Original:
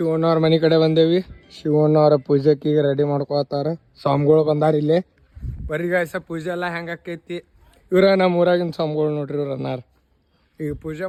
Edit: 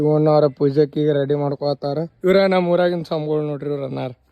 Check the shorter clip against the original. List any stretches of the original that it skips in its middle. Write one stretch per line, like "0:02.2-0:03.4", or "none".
0:03.8-0:07.8